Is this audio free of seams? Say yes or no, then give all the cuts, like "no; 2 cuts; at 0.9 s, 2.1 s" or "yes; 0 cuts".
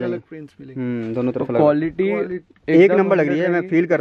yes; 0 cuts